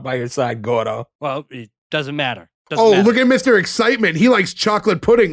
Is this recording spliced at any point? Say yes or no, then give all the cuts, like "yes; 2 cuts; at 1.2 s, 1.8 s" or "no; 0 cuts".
yes; 1 cut; at 1.1 s